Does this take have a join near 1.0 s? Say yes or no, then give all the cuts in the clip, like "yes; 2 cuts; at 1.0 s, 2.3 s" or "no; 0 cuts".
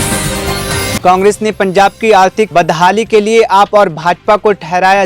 yes; 1 cut; at 1.0 s